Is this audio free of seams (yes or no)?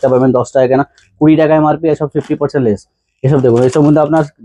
yes